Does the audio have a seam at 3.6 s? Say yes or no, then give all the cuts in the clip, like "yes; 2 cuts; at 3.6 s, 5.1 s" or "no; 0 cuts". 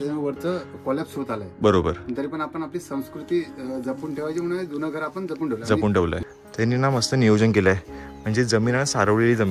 no; 1 cut; at 6.2 s